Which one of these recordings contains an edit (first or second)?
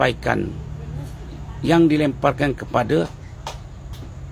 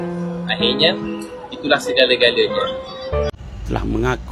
second